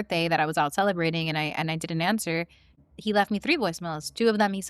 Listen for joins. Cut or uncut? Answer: cut